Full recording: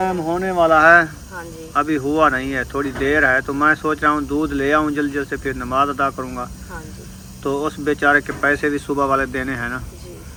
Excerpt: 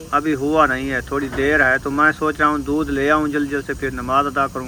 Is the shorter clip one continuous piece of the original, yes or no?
yes